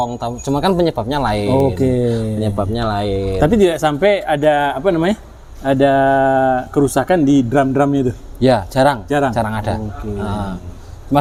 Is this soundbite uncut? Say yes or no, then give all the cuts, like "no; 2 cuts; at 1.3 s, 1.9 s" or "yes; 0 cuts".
yes; 0 cuts